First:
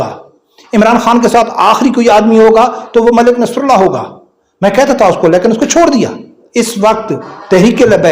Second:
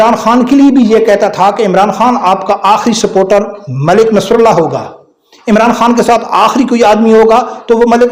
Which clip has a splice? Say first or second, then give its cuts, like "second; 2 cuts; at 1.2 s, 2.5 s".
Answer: first; 1 cut; at 6.4 s